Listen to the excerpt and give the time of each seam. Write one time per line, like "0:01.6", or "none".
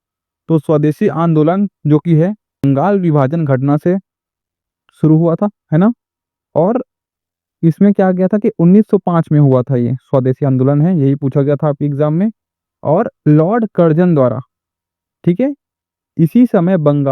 0:02.6

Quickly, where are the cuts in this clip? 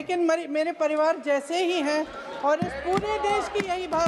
none

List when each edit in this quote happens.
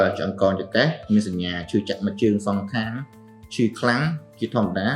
none

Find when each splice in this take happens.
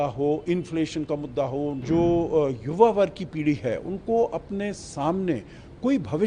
0:01.8

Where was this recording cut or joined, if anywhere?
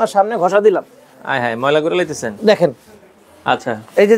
none

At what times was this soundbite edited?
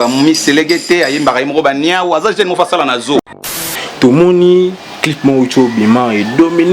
0:03.5

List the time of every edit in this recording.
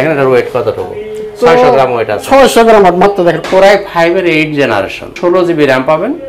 0:03.4
0:05.1

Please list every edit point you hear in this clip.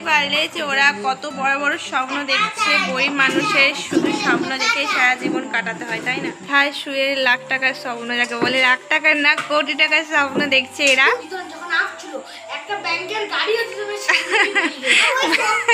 0:06.4
0:11.2

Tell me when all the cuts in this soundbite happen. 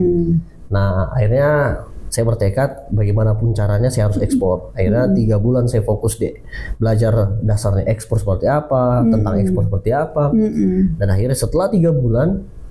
none

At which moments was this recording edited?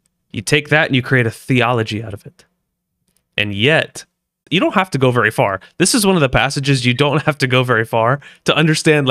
0:04.4

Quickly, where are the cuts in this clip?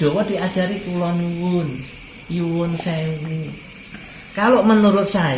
none

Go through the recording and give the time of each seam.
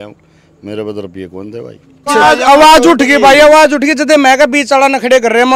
0:02.1

